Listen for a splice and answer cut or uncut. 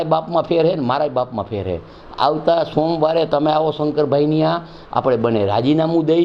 uncut